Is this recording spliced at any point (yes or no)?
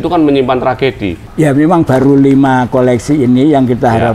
yes